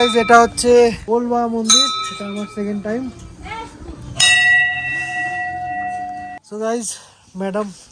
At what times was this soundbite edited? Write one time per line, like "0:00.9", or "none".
0:01.0
0:06.4